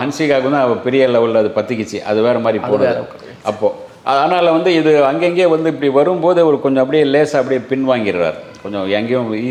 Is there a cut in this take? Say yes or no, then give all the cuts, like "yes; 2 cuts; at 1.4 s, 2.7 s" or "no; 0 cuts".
no; 0 cuts